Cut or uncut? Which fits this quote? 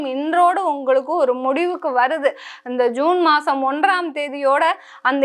uncut